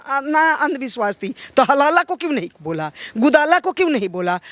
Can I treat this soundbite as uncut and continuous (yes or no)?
yes